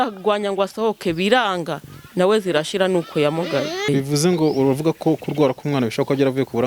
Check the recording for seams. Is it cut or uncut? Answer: cut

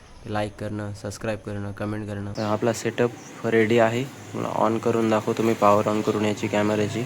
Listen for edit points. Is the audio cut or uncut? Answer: cut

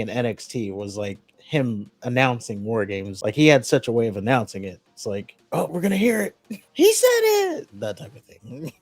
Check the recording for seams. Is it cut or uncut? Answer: cut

